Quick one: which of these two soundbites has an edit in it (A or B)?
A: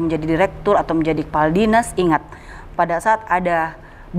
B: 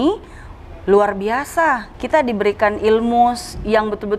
B